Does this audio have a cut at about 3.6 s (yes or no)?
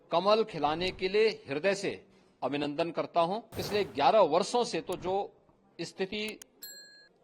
yes